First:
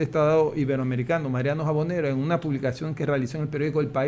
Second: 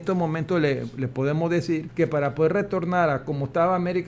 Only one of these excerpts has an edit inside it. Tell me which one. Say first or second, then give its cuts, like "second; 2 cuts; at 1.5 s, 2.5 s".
second; 1 cut; at 1.9 s